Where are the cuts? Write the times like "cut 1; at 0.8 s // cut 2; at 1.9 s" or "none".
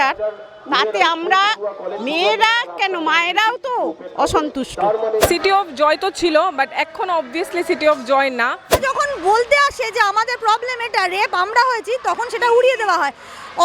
cut 1; at 5.3 s // cut 2; at 8.8 s